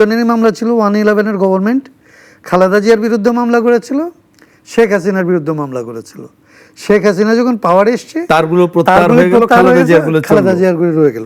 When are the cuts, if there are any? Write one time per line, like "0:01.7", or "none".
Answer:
none